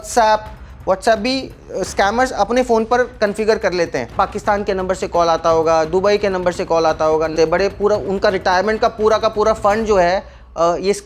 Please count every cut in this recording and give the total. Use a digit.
2